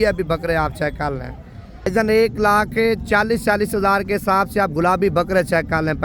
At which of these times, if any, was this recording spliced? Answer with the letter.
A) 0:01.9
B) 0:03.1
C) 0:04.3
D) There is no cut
A